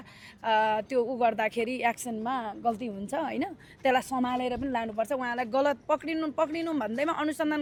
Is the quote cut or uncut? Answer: uncut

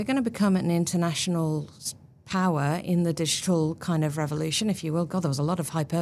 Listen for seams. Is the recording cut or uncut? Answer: uncut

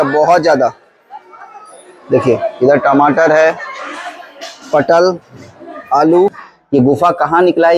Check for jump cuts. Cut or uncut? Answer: cut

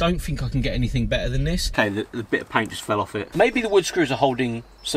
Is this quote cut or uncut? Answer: cut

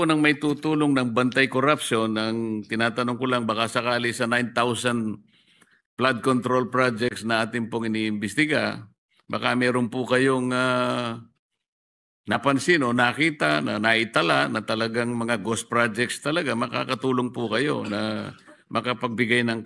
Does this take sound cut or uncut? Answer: uncut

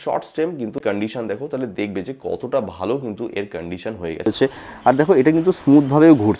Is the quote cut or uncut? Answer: cut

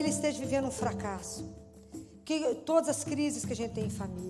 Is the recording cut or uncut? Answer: uncut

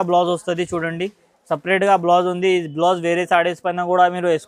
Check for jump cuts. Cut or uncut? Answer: uncut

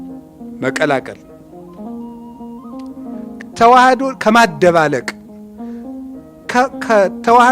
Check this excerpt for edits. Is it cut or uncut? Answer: cut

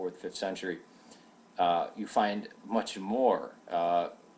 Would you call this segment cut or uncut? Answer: uncut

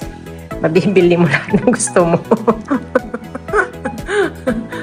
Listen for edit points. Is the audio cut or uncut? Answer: uncut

